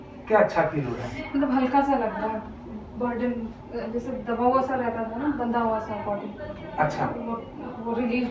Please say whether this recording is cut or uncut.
uncut